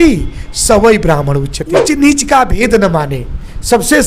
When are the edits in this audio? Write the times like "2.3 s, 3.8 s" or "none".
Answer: 1.8 s